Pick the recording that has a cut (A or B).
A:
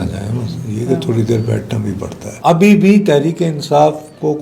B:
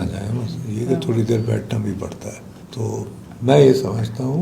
A